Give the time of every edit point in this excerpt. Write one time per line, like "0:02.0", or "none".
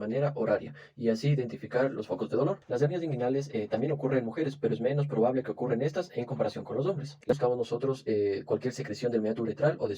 0:02.6
0:07.4